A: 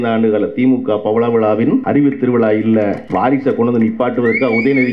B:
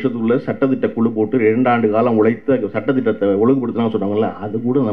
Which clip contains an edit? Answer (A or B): A